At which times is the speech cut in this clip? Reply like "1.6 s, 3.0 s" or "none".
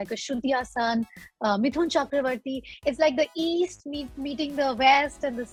none